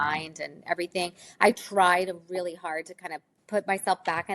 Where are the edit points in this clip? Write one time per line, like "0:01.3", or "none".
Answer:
0:03.4